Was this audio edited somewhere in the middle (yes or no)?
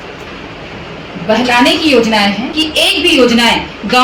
yes